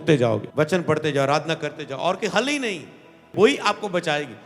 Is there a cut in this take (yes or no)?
yes